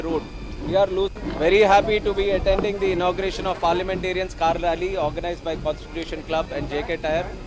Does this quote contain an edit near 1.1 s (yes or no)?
yes